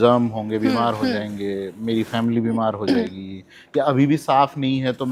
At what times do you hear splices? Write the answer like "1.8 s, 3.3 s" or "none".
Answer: none